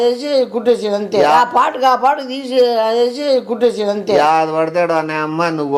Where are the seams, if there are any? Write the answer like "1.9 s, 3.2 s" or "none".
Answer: none